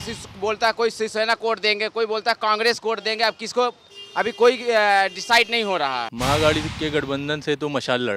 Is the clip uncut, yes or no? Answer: no